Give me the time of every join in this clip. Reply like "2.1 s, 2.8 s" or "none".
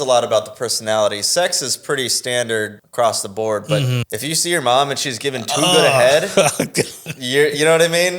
2.8 s, 4.1 s, 7.0 s